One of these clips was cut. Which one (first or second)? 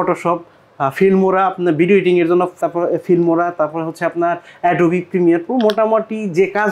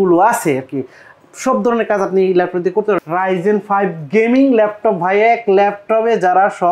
second